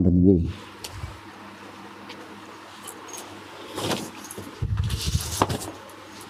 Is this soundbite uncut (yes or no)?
yes